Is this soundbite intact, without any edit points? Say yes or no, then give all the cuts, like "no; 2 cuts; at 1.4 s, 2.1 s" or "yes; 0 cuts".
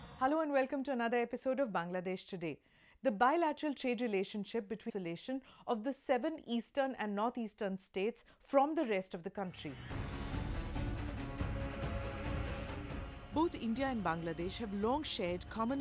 yes; 0 cuts